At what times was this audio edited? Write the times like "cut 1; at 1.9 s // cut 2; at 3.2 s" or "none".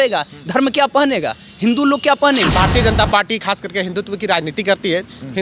cut 1; at 2.5 s